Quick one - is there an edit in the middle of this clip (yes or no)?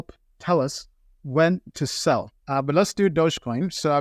yes